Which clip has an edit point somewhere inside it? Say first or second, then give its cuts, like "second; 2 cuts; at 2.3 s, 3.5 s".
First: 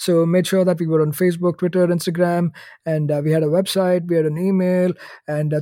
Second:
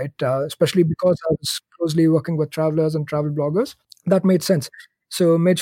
second; 1 cut; at 3.9 s